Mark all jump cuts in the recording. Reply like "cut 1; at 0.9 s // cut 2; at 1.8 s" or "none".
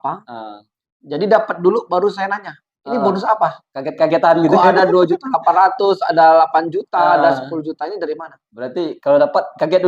none